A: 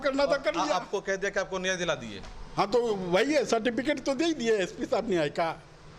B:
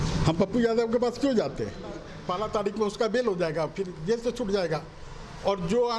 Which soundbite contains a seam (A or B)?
B